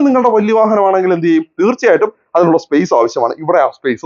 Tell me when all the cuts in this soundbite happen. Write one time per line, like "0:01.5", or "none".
none